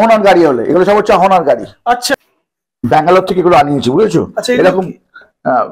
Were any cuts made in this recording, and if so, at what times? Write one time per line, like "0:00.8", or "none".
0:02.1